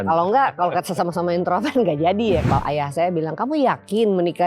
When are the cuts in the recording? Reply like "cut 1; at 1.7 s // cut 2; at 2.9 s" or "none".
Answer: cut 1; at 2.4 s